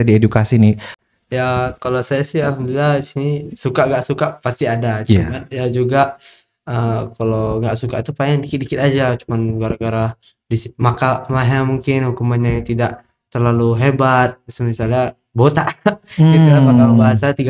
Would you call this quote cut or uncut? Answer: cut